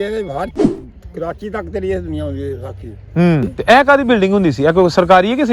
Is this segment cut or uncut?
cut